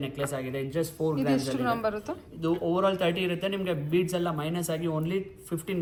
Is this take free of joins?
yes; 0 cuts

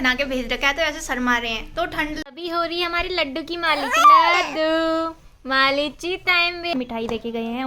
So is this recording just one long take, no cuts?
no; 2 cuts; at 2.2 s, 6.7 s

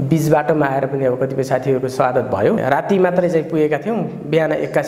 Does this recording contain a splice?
yes; 1 cut; at 2.6 s

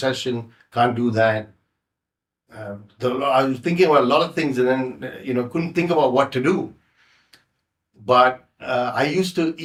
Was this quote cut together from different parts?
no; 0 cuts

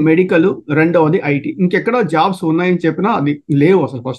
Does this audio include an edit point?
no; 0 cuts

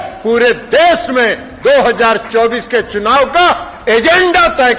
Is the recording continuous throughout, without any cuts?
yes; 0 cuts

